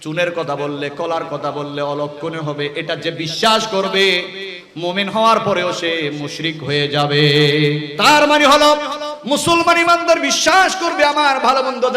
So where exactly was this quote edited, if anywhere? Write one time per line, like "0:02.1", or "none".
0:07.9